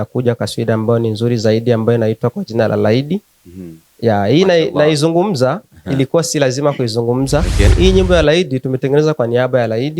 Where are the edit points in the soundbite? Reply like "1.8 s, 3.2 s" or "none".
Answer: 7.7 s